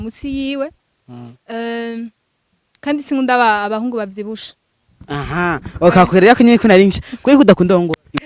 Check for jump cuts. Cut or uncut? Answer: uncut